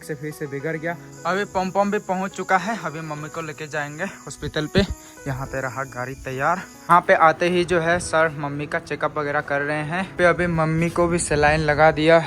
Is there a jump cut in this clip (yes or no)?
yes